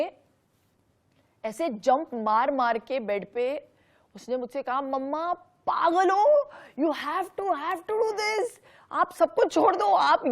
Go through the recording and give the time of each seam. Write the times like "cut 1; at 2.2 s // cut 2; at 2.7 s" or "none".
none